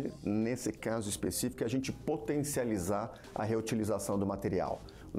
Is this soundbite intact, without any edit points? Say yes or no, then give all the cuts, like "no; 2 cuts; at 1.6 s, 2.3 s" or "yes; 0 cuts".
yes; 0 cuts